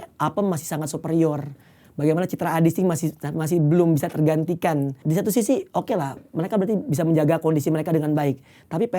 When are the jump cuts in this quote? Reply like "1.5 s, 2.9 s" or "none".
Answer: 5.0 s